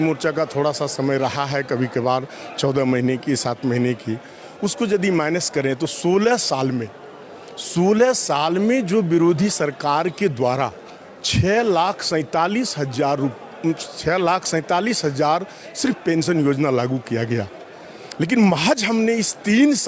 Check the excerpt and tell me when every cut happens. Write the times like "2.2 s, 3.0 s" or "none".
none